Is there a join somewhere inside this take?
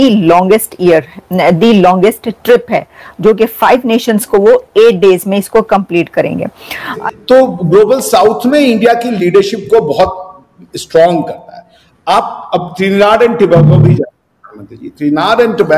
yes; 1 cut; at 7.0 s

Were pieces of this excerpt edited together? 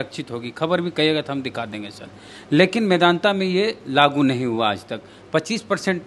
no; 0 cuts

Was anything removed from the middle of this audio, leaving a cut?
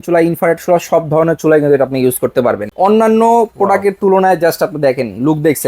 yes; 1 cut; at 2.7 s

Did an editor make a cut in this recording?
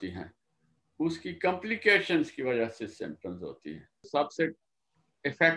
yes; 1 cut; at 4.1 s

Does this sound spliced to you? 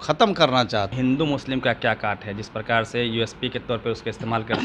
yes; 1 cut; at 0.9 s

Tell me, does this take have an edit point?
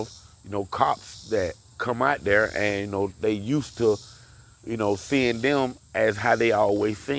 no; 0 cuts

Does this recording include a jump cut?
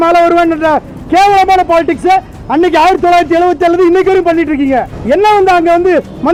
no; 0 cuts

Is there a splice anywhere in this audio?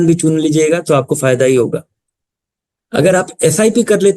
no; 0 cuts

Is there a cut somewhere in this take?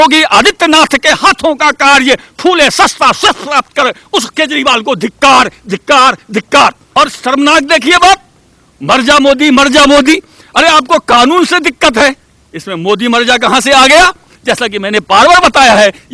yes; 2 cuts; at 6.8 s, 14.3 s

